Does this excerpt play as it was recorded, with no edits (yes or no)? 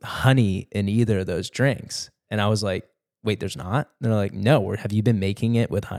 yes